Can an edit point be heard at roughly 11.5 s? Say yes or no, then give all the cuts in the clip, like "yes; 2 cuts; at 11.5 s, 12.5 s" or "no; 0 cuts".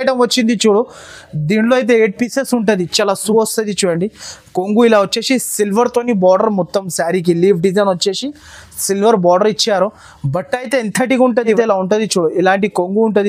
yes; 2 cuts; at 3.3 s, 11.5 s